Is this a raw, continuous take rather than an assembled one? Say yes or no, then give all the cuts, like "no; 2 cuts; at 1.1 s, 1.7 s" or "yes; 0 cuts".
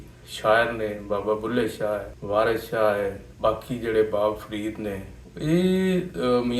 no; 1 cut; at 2.1 s